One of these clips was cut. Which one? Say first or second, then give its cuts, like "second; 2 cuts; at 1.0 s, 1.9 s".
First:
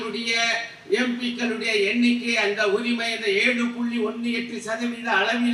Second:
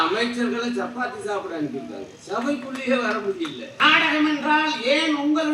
second; 1 cut; at 3.8 s